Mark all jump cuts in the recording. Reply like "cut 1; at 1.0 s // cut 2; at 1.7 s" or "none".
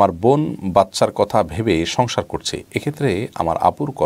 none